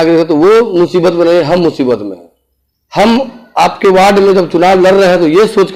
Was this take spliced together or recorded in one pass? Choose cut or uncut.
uncut